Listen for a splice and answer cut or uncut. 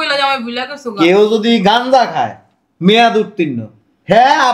uncut